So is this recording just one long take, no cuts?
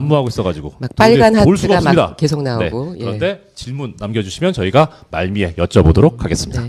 yes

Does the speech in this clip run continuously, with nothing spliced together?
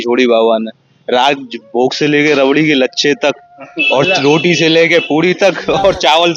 yes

